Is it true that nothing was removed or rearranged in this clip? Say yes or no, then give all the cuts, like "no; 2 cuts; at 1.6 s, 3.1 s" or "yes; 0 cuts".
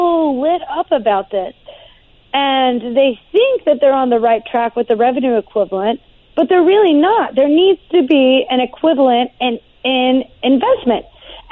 yes; 0 cuts